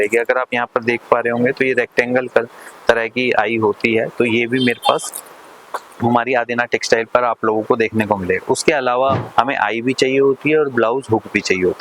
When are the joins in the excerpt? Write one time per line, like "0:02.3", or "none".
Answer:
0:09.2